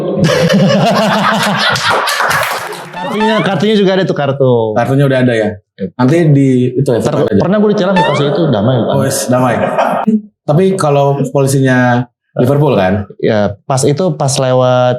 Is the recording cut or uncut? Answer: cut